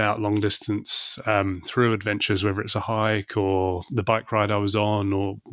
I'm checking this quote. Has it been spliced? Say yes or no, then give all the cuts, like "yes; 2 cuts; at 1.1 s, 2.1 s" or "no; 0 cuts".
yes; 1 cut; at 3.8 s